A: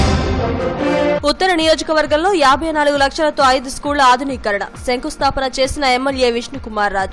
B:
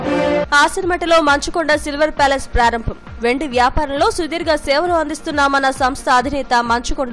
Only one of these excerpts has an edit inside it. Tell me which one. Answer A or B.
A